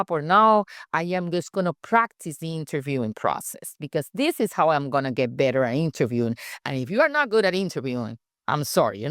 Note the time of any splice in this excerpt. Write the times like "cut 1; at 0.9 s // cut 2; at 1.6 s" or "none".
none